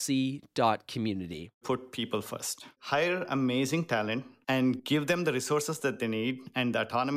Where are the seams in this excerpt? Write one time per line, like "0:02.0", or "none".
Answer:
0:01.6
0:02.7
0:04.8